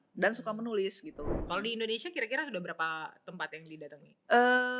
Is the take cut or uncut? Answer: cut